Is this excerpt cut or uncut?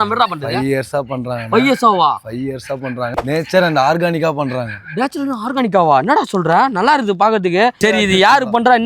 cut